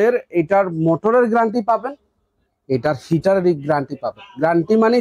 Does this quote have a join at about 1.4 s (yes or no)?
no